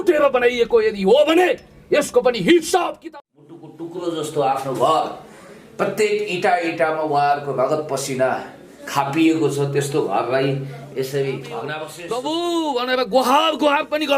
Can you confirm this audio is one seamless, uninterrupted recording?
no; 2 cuts; at 2.9 s, 11.9 s

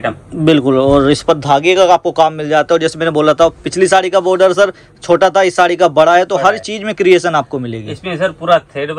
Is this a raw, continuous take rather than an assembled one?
yes; 0 cuts

